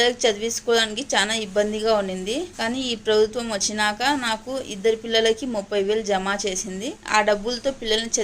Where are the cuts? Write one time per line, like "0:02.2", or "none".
0:02.5
0:06.9